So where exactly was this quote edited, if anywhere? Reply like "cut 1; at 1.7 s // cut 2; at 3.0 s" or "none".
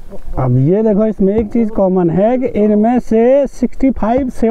none